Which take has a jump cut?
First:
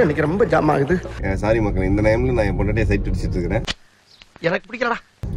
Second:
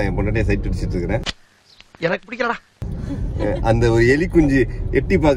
first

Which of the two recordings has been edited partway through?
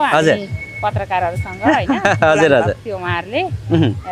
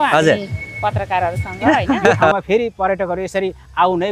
second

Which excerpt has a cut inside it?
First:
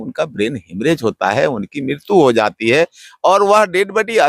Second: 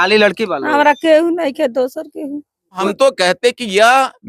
second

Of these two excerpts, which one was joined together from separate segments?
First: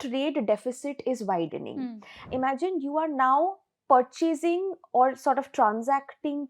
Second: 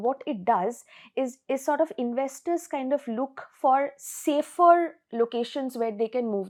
first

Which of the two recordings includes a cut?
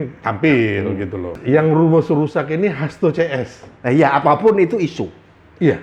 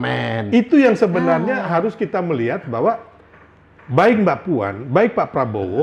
first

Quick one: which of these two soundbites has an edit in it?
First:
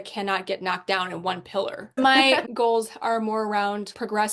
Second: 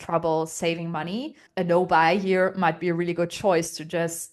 first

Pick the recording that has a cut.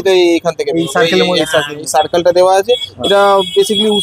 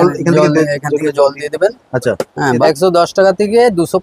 second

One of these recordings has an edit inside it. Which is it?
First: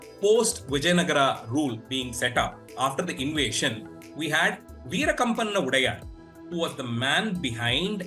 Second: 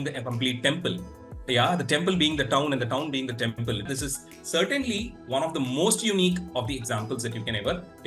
second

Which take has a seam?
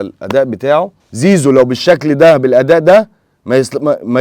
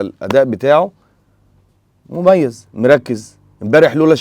first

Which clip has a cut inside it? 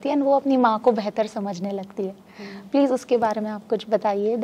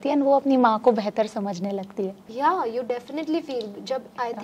second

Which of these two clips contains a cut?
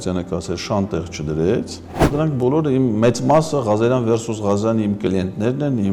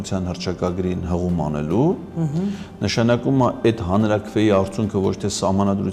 first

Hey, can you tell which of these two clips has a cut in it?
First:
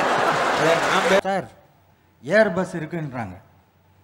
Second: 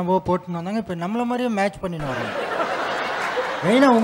first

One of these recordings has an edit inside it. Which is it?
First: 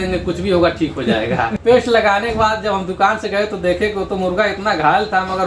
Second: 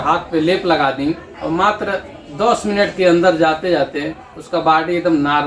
first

